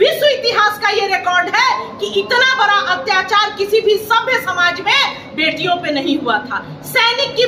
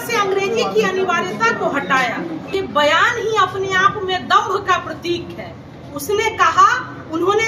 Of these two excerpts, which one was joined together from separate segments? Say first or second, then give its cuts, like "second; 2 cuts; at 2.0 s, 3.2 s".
second; 1 cut; at 2.5 s